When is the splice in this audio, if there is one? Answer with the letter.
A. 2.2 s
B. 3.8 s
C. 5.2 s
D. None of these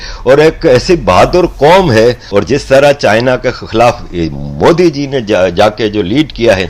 A